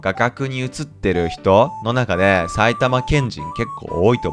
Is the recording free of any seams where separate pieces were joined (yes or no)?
yes